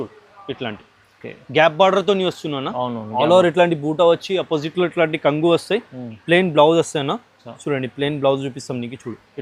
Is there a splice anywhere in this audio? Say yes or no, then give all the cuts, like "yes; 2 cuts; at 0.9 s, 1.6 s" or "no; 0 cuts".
no; 0 cuts